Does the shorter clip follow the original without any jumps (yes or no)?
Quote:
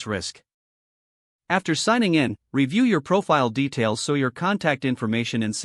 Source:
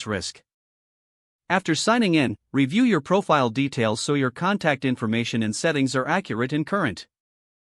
yes